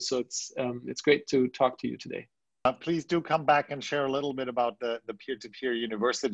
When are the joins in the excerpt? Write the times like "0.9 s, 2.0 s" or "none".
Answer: 2.7 s